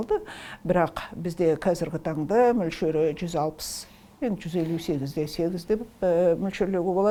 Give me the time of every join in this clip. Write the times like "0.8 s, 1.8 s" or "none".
none